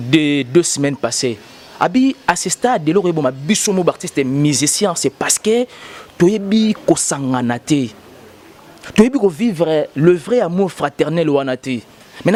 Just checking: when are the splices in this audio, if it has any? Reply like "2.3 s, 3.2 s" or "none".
none